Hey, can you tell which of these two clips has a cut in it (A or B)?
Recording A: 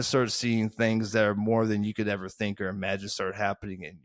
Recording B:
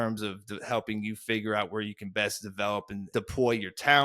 B